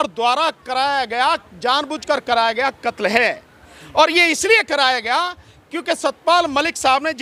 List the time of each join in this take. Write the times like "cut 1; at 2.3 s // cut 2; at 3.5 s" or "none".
none